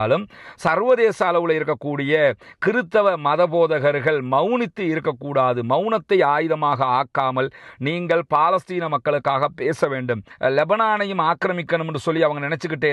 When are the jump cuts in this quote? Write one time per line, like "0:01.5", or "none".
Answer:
0:10.3